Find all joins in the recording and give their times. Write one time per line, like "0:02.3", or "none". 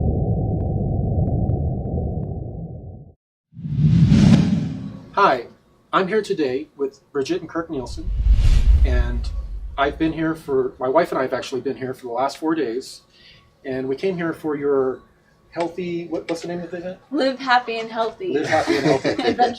0:16.4